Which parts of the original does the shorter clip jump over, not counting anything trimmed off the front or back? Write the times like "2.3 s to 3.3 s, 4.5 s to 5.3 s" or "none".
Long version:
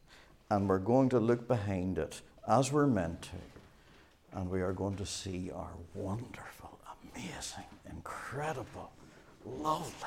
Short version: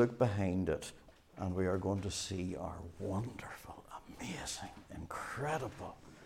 2.3 s to 3.9 s